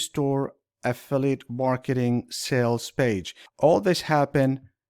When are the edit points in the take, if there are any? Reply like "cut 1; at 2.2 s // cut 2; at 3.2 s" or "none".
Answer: cut 1; at 3.4 s